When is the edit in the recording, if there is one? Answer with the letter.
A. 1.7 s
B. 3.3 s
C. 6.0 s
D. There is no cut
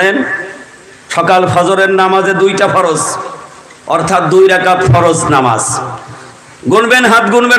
D